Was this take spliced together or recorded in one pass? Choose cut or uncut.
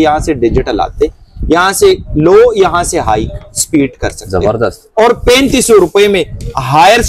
uncut